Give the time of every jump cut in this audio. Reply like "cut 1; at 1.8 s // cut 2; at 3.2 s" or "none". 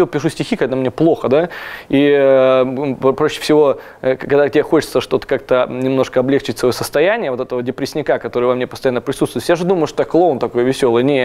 none